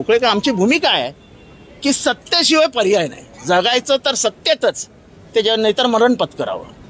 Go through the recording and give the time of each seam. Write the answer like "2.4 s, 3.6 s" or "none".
none